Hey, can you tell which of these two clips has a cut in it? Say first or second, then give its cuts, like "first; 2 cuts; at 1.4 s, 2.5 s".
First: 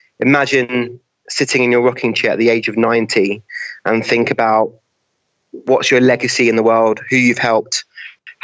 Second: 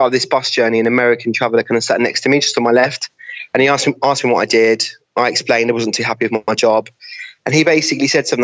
second; 1 cut; at 2.2 s